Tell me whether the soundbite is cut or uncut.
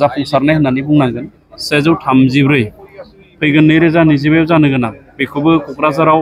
cut